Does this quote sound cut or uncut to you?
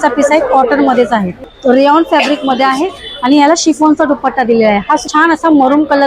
cut